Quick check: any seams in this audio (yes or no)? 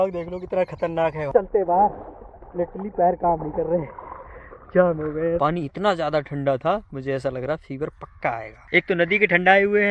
yes